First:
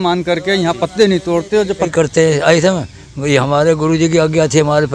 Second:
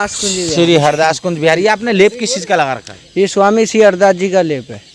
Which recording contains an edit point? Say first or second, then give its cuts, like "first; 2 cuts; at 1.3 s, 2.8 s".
first; 1 cut; at 1.9 s